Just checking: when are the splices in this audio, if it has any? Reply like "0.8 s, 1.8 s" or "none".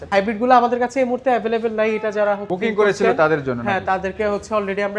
none

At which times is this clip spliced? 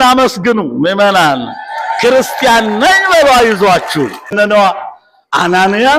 4.3 s

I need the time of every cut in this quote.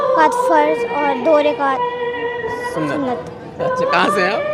none

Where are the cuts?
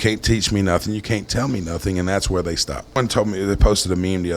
2.9 s

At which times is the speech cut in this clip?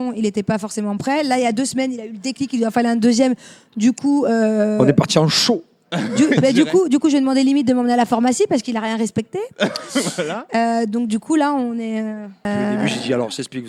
12.5 s

